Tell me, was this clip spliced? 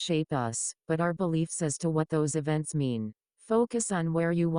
yes; 1 cut; at 3.2 s

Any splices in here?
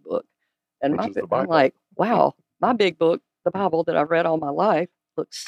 yes; 1 cut; at 2.5 s

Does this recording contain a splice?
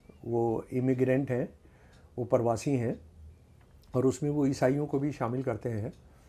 no; 0 cuts

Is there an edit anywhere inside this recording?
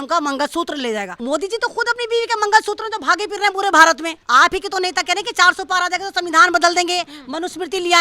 yes; 2 cuts; at 1.2 s, 4.2 s

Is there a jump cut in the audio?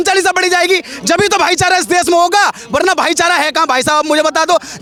no; 0 cuts

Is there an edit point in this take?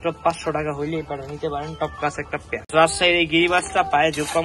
no; 0 cuts

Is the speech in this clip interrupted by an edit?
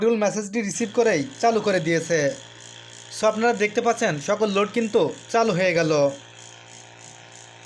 no; 0 cuts

